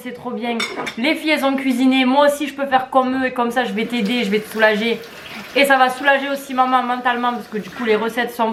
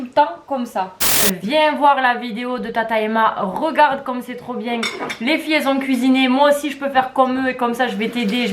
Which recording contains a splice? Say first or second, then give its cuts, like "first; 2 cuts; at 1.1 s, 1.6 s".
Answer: second; 1 cut; at 1.2 s